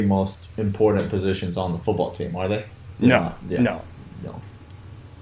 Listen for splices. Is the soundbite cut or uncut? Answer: uncut